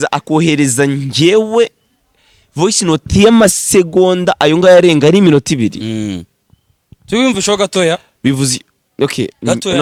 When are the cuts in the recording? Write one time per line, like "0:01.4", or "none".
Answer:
none